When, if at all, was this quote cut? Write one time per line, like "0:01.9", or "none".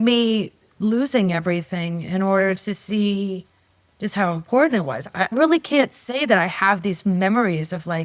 0:05.3